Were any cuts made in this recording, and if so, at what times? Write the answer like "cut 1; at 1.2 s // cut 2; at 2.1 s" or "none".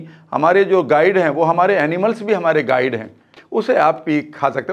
cut 1; at 3.4 s